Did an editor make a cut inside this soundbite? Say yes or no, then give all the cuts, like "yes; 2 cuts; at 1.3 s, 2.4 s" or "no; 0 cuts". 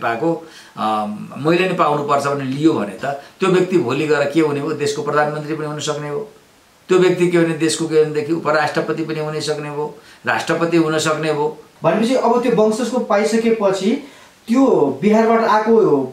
yes; 1 cut; at 11.7 s